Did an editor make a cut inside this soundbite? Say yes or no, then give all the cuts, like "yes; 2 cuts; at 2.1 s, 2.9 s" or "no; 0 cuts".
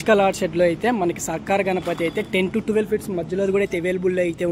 no; 0 cuts